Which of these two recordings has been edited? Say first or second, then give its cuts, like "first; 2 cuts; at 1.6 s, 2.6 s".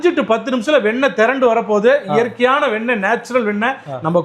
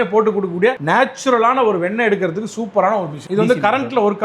second; 1 cut; at 3.2 s